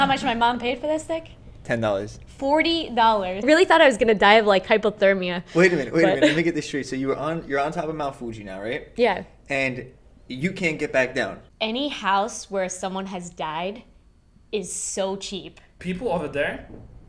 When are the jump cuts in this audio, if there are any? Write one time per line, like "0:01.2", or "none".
0:03.4
0:11.4
0:15.7